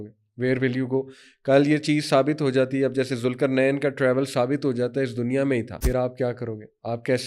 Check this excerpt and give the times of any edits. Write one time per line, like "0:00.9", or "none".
0:05.7